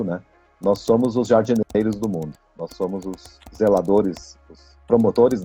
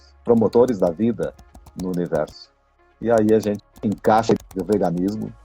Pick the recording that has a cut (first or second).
second